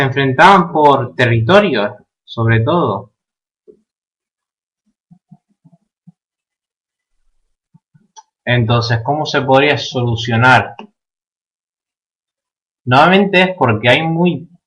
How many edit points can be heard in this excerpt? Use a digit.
1